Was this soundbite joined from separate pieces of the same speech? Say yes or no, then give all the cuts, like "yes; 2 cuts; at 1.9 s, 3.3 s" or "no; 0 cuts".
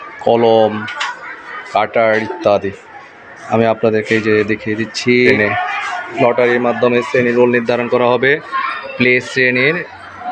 yes; 1 cut; at 5.3 s